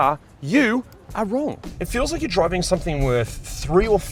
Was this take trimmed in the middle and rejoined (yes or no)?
yes